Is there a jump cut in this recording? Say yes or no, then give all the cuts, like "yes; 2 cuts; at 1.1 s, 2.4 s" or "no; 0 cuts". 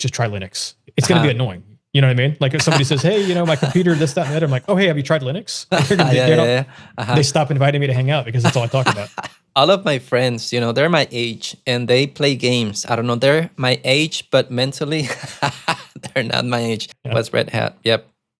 yes; 2 cuts; at 9.4 s, 17.0 s